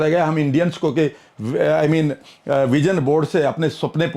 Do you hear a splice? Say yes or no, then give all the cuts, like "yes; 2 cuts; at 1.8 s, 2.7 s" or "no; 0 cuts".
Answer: no; 0 cuts